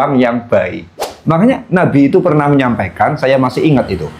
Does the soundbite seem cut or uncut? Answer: cut